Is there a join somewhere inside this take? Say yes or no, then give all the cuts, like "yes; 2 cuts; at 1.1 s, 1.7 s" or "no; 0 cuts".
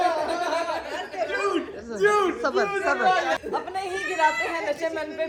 no; 0 cuts